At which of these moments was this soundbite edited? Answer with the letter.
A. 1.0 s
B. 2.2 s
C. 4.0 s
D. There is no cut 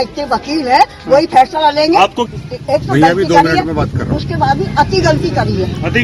B